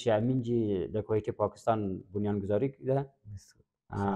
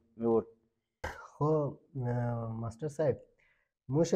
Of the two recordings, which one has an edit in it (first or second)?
second